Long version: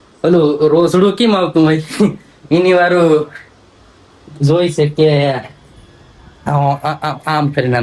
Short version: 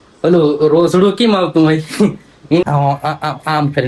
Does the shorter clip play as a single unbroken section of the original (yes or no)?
no